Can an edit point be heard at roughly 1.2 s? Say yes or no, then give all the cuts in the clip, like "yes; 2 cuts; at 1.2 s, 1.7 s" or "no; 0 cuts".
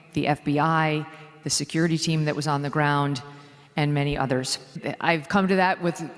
no; 1 cut; at 4.7 s